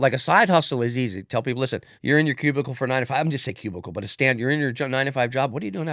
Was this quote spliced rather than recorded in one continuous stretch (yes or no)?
yes